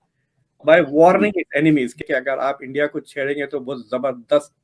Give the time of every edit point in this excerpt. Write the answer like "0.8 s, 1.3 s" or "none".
2.0 s

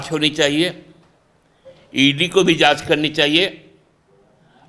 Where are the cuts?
none

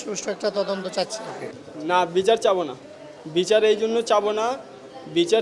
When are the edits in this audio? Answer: 1.6 s

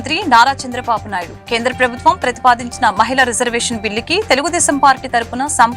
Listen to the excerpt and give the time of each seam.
none

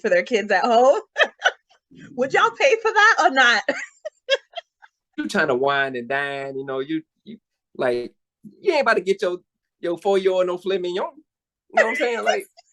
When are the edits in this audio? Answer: 5.2 s

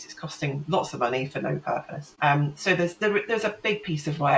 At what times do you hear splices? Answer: 2.0 s

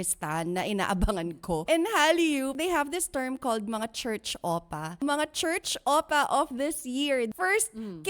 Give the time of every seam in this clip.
1.7 s, 2.5 s, 5.0 s, 7.3 s

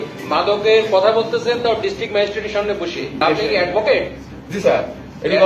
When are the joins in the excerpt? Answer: 3.2 s

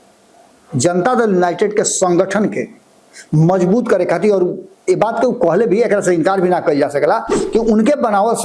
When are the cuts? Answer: none

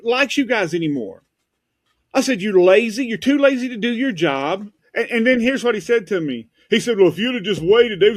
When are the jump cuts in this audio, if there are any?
4.8 s

